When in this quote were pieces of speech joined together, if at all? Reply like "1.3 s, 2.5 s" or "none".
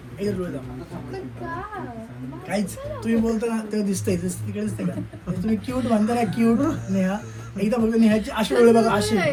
none